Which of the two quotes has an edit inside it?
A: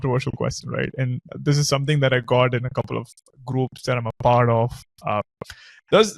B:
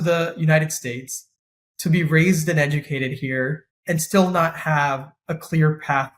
B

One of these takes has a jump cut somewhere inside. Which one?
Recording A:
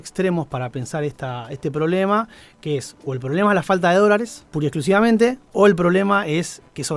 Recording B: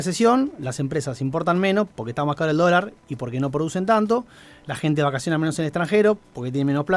A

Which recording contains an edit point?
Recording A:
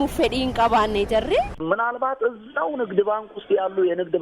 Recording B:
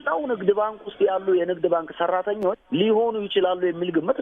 A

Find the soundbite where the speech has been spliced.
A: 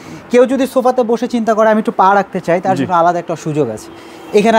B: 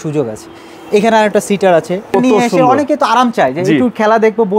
B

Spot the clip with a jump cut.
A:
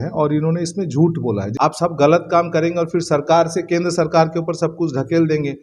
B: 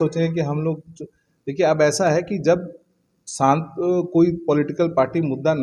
A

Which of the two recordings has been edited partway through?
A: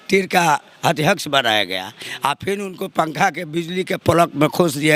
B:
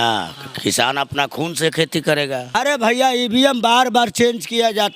B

